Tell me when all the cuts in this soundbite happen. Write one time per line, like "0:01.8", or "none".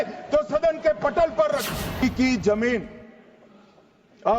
0:02.0